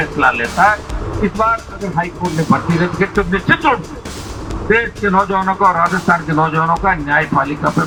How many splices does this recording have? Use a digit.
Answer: 0